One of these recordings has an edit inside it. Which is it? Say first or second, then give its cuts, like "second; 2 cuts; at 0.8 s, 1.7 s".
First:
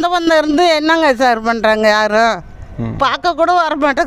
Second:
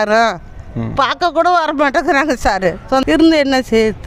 second; 1 cut; at 3.0 s